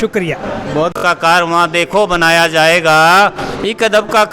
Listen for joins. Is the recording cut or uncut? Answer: cut